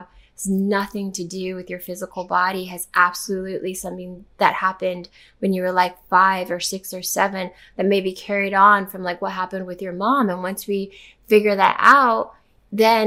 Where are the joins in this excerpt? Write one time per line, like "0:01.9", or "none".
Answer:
none